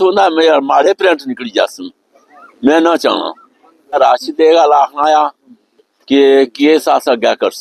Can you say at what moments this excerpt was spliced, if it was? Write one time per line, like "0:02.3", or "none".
0:04.0